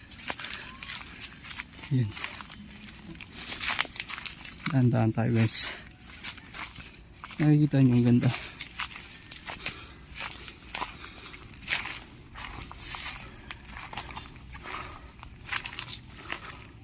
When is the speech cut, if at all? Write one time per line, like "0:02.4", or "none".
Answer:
0:06.6
0:11.4

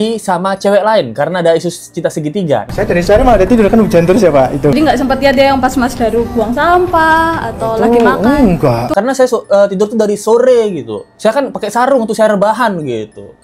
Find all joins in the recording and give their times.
0:02.7
0:04.7
0:08.8

